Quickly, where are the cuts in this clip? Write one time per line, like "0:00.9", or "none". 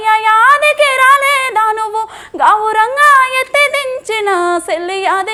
none